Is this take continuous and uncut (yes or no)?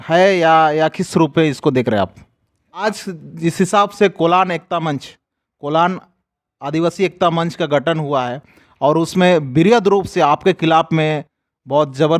no